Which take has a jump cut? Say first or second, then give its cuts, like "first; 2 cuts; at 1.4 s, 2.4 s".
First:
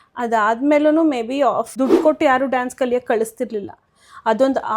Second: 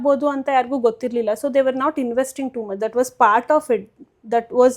first; 1 cut; at 1.7 s